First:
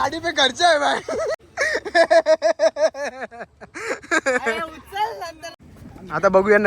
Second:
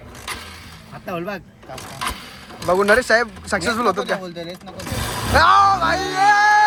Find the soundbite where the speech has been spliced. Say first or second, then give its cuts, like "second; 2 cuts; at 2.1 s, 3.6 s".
first; 2 cuts; at 1.4 s, 5.4 s